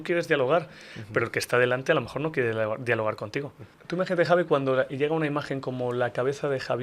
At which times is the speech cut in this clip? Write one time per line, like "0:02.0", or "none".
0:03.8